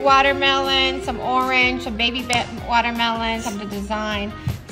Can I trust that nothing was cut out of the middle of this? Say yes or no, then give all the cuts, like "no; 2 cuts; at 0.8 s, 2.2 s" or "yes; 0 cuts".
yes; 0 cuts